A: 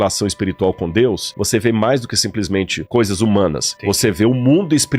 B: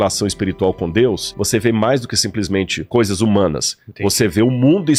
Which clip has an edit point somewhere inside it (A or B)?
A